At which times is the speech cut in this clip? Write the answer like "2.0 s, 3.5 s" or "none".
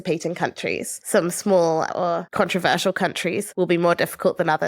0.9 s, 2.3 s, 3.5 s